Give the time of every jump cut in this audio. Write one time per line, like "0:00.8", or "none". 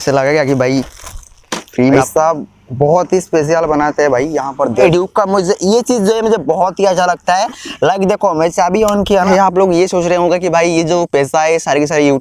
0:02.0
0:04.9
0:09.3